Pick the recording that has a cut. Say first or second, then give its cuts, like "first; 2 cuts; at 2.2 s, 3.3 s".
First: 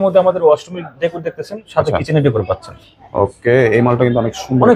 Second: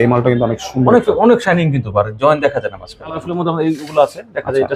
second; 1 cut; at 3.3 s